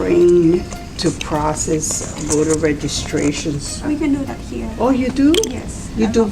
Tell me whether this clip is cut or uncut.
cut